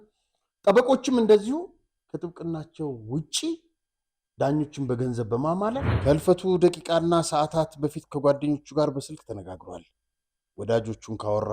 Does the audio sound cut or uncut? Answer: cut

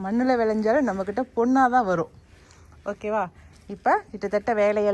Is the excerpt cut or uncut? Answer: uncut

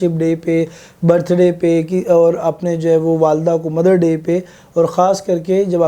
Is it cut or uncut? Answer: uncut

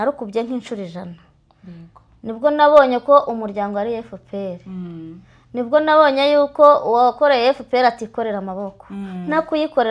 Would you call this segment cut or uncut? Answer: uncut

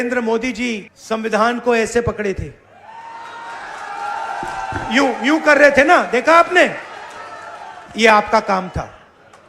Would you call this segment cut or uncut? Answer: cut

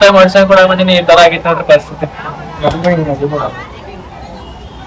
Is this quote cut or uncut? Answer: uncut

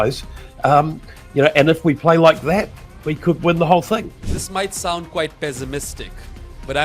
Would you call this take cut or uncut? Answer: cut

